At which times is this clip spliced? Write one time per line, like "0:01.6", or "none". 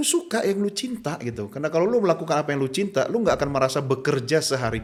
none